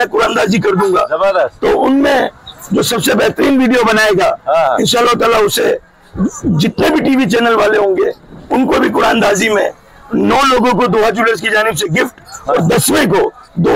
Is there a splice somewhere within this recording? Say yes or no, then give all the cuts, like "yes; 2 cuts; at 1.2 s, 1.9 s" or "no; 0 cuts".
no; 0 cuts